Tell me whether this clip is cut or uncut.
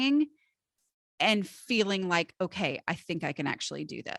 uncut